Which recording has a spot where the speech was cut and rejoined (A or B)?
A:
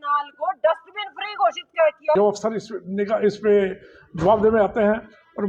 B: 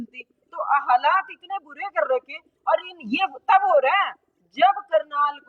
A